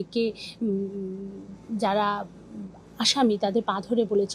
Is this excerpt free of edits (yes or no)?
yes